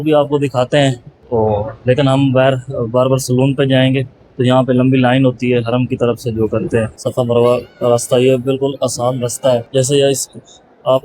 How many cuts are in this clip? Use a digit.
3